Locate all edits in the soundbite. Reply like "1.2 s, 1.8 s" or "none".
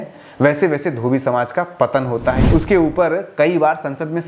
2.4 s

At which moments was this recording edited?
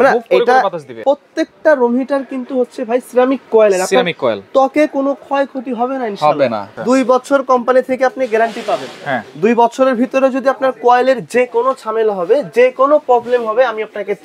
1.0 s, 6.7 s

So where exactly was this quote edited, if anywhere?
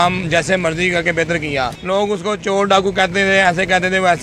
none

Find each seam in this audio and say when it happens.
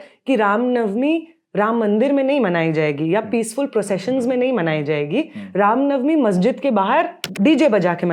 7.2 s

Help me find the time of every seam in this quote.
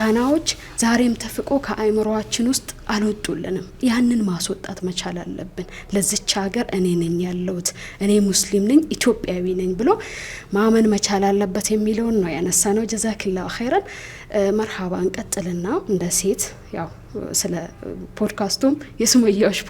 none

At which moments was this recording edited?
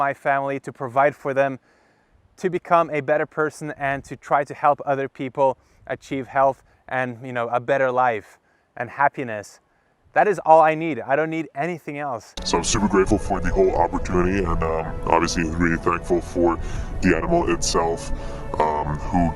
12.4 s

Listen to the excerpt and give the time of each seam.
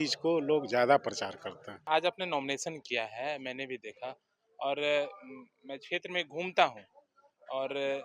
1.9 s

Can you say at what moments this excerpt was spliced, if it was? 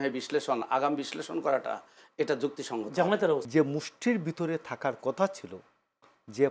3.4 s

